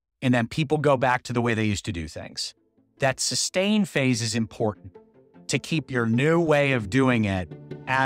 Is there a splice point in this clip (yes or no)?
no